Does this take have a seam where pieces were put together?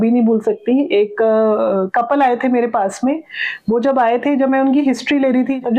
no; 0 cuts

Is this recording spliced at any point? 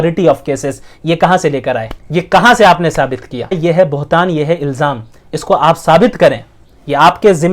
yes; 2 cuts; at 2.0 s, 3.6 s

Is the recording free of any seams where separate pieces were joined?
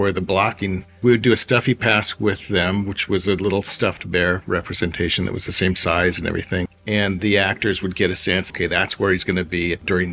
no; 3 cuts; at 0.9 s, 6.7 s, 8.5 s

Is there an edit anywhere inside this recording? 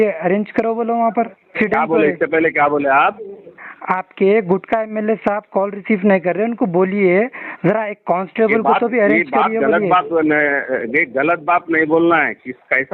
yes; 1 cut; at 1.5 s

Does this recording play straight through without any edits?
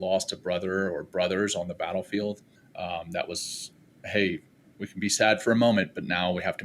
yes; 0 cuts

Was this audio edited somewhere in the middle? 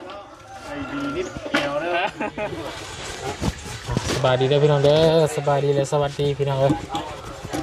yes; 1 cut; at 2.5 s

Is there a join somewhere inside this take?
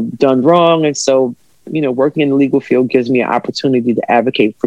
no; 0 cuts

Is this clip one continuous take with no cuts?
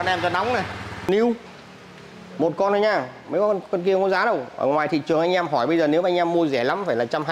no; 1 cut; at 1.0 s

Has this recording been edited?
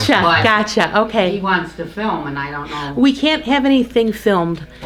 no; 0 cuts

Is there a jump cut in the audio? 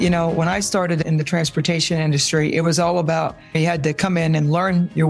yes; 2 cuts; at 1.0 s, 3.5 s

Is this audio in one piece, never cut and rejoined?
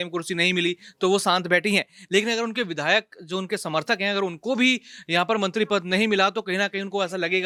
yes; 0 cuts

